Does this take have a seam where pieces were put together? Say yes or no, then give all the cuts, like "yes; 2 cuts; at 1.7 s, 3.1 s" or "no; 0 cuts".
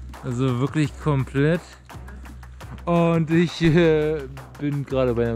no; 0 cuts